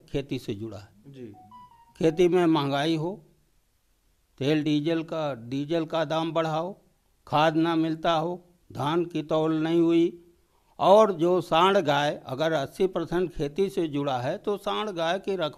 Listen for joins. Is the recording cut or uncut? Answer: uncut